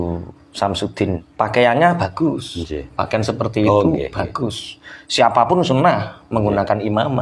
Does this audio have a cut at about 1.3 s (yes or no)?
yes